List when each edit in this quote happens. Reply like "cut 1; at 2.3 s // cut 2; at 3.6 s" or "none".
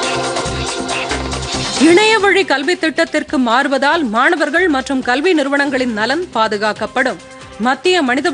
cut 1; at 1.0 s

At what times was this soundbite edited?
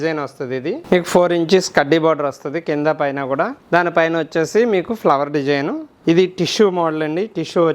cut 1; at 0.8 s // cut 2; at 3.6 s // cut 3; at 5.8 s

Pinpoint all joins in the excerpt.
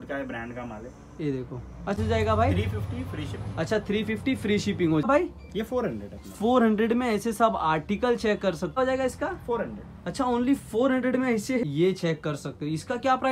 cut 1; at 2.0 s // cut 2; at 5.1 s // cut 3; at 8.8 s // cut 4; at 11.7 s

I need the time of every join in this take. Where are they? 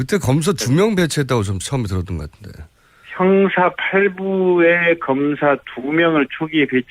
cut 1; at 3.7 s

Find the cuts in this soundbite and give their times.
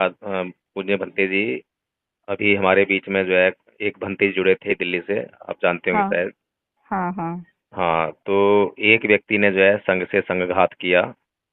cut 1; at 4.7 s

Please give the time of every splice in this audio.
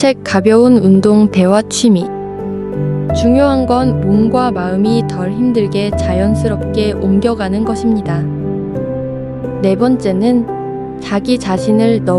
none

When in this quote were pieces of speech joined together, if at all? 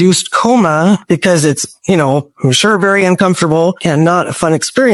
none

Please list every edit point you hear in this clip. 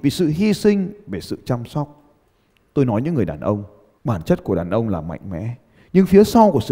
none

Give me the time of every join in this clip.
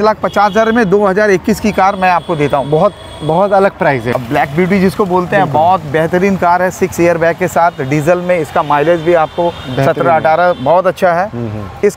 cut 1; at 4.1 s

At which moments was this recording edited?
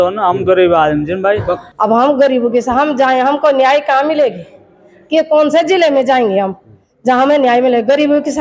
cut 1; at 1.6 s

